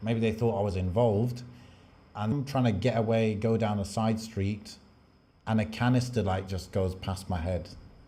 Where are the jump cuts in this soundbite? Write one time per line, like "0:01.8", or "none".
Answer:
0:02.3